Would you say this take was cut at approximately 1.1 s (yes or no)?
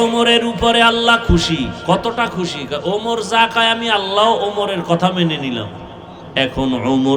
no